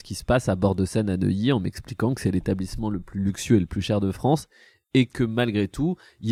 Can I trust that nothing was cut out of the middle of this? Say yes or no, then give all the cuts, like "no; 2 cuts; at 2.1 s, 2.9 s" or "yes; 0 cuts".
yes; 0 cuts